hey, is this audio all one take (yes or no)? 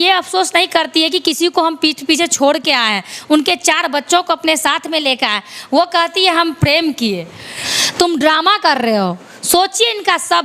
no